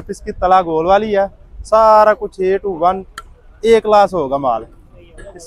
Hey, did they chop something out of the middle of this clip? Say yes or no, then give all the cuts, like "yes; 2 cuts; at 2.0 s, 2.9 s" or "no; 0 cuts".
no; 0 cuts